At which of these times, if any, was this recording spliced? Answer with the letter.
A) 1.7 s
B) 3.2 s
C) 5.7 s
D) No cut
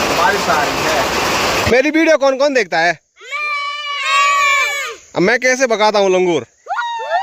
A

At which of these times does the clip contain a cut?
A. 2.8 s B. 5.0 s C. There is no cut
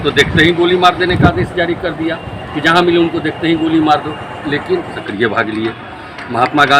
B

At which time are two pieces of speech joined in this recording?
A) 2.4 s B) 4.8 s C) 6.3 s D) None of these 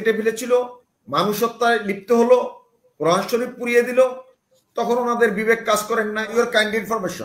C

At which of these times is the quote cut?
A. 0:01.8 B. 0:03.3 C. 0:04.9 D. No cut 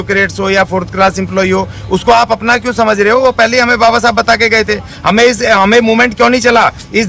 D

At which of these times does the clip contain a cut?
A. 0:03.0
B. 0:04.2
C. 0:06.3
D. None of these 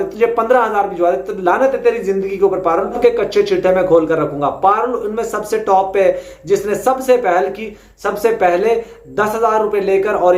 A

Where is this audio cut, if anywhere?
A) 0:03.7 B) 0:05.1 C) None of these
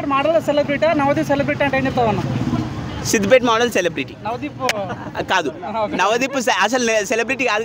C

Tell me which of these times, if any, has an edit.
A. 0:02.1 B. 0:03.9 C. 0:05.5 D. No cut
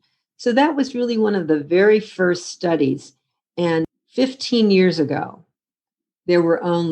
B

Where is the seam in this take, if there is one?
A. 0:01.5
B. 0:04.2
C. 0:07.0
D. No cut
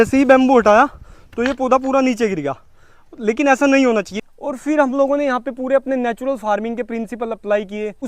B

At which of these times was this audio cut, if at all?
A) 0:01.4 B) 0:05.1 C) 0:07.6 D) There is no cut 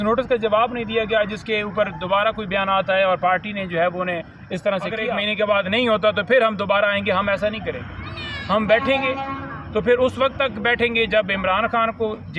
B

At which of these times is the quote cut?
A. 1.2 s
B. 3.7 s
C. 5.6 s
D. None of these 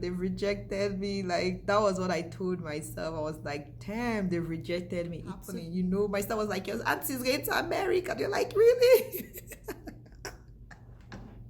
C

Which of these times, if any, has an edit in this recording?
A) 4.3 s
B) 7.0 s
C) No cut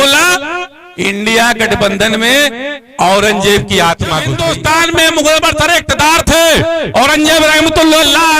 A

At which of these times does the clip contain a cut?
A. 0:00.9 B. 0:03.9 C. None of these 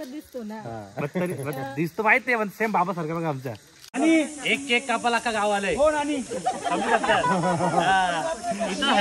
B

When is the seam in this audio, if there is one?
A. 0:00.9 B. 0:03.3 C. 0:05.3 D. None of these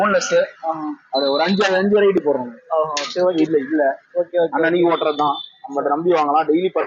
B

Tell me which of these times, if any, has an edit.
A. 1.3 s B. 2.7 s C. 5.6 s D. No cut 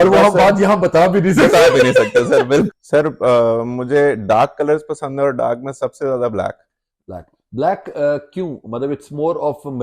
B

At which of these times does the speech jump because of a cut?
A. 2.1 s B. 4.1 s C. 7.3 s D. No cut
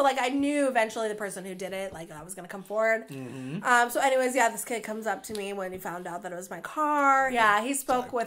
C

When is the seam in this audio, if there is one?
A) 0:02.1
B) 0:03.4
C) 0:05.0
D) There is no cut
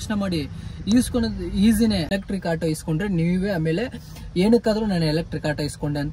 A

